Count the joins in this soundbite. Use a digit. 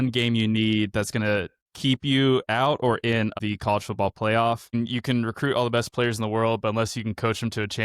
2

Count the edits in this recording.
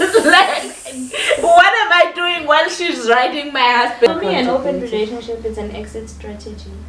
1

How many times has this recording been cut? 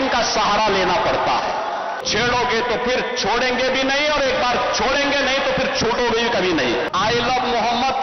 2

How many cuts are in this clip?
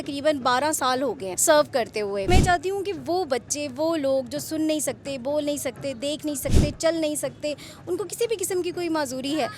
2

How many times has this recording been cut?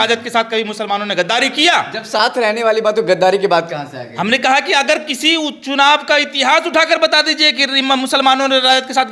0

